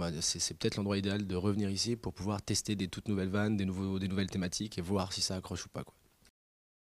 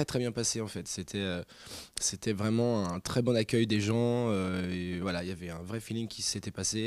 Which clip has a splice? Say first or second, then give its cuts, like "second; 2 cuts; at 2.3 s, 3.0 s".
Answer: first; 1 cut; at 1.7 s